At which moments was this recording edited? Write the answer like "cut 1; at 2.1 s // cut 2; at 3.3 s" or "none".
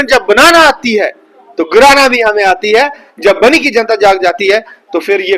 cut 1; at 3.1 s